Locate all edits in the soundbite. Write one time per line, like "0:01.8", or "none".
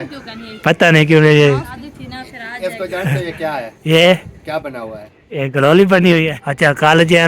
0:01.8
0:06.3